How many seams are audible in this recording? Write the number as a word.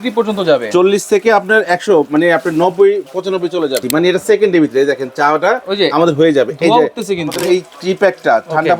two